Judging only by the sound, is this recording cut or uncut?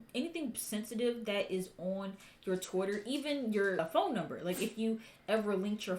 cut